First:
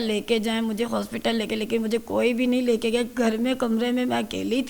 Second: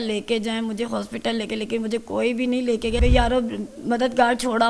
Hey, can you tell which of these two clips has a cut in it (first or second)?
second